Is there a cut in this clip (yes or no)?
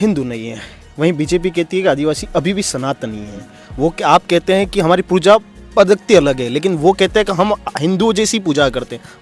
no